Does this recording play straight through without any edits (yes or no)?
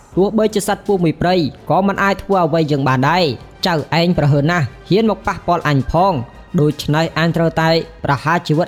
yes